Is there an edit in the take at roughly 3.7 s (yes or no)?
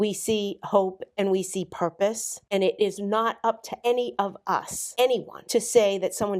yes